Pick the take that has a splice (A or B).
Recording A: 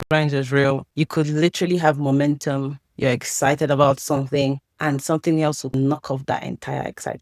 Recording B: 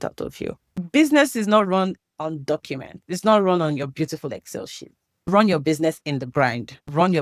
B